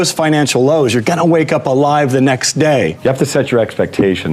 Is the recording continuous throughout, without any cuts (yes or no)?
no